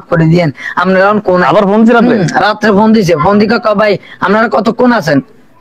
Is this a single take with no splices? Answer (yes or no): yes